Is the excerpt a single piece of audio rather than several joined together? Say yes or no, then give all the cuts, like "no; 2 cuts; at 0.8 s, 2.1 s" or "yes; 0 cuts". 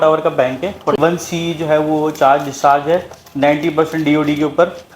no; 1 cut; at 1.0 s